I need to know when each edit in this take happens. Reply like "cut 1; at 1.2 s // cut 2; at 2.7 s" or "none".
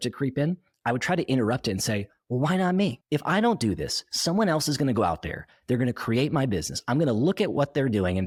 none